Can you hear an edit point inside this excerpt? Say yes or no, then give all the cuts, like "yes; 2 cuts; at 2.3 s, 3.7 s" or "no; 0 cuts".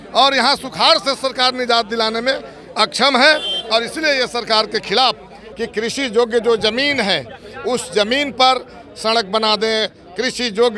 yes; 1 cut; at 5.4 s